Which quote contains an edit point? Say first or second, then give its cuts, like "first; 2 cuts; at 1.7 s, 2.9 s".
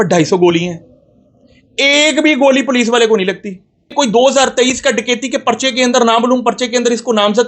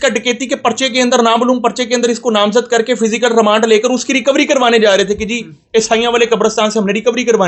first; 1 cut; at 3.9 s